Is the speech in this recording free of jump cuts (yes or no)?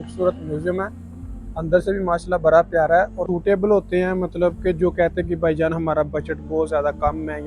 no